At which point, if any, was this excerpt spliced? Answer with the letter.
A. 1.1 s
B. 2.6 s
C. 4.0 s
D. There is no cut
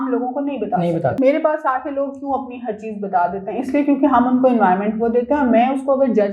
A